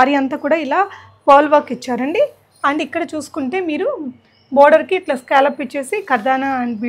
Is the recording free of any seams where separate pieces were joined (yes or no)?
yes